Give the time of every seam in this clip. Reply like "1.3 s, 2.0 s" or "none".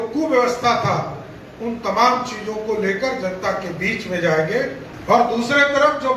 4.9 s

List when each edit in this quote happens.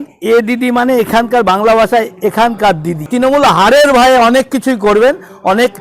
3.1 s

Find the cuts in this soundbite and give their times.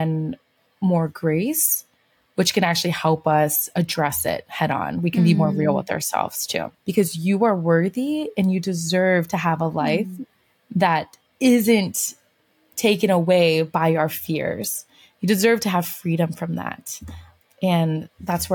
6.7 s

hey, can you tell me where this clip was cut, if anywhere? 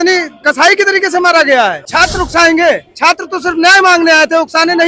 1.8 s

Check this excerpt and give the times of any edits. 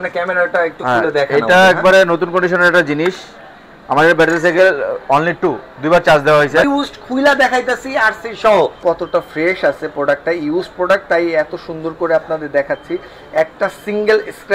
6.6 s, 8.8 s

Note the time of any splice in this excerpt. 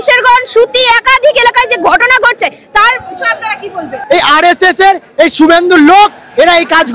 3.9 s

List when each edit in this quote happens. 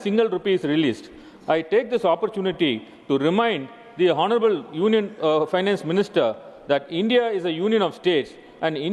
none

